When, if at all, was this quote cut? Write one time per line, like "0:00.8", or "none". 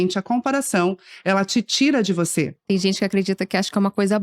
0:02.6